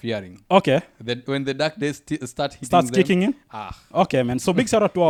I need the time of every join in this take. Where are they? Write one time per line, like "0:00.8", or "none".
none

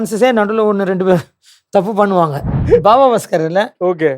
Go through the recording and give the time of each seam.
0:02.6

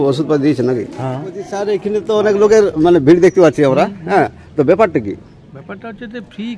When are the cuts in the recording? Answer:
0:01.4

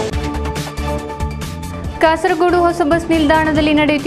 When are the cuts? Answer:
0:01.0

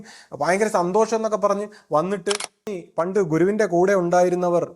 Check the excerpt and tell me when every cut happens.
0:02.7

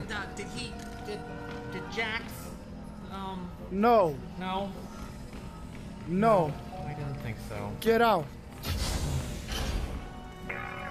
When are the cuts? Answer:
none

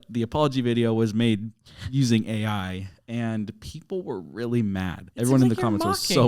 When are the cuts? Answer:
0:05.0

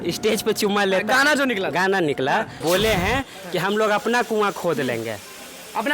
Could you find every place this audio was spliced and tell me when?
0:02.5

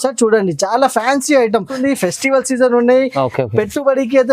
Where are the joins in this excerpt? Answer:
0:01.7

